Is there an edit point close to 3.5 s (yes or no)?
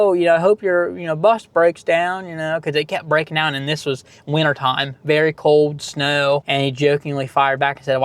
no